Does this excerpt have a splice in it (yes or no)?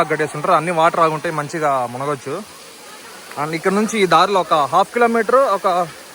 no